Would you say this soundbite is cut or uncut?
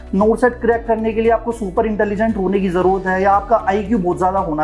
uncut